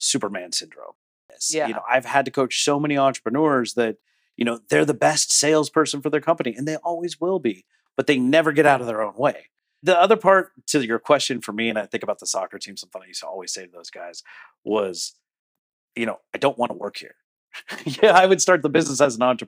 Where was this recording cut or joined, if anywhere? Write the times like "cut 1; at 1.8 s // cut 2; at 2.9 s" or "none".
cut 1; at 1.1 s // cut 2; at 9.8 s